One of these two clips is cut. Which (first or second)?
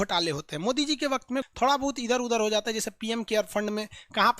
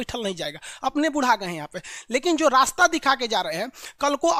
first